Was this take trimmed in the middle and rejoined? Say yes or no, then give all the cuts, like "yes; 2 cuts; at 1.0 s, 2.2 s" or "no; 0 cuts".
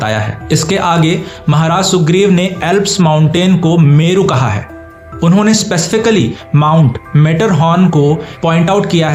no; 0 cuts